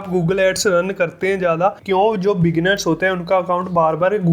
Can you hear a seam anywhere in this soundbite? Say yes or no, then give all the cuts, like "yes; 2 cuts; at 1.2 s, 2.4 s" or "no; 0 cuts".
yes; 1 cut; at 1.8 s